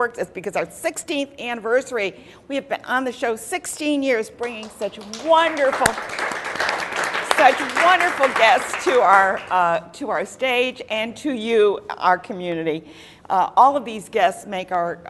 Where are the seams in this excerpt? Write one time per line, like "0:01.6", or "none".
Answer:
none